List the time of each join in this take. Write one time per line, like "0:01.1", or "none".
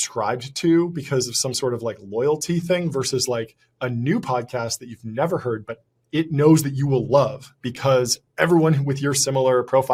none

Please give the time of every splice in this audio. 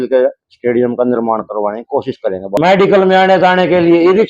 0:02.6

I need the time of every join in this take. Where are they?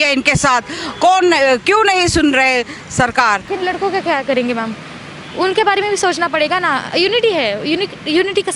0:03.5

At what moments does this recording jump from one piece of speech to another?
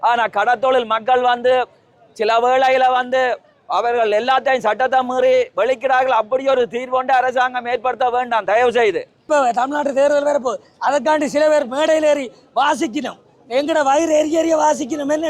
0:09.3

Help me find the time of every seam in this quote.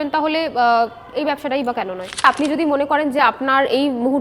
0:02.2

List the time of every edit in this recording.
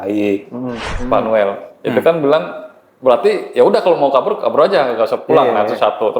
0:00.9

